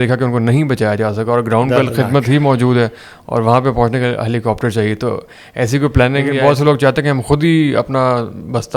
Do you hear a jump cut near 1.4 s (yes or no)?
no